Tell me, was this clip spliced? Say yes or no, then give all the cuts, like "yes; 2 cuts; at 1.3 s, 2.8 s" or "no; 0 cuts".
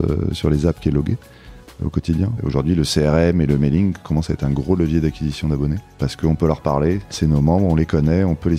yes; 3 cuts; at 1.9 s, 5.9 s, 7.1 s